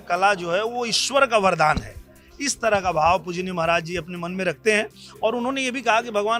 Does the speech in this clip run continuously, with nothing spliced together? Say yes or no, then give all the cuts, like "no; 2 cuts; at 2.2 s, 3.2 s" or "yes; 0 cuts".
yes; 0 cuts